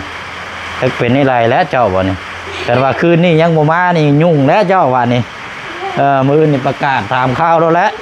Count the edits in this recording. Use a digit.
0